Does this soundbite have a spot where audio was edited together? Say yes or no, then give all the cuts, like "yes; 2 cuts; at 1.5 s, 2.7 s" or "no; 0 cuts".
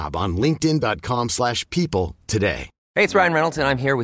yes; 1 cut; at 2.7 s